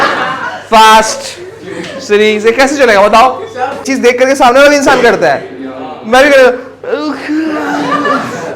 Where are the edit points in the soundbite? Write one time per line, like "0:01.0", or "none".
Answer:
0:03.9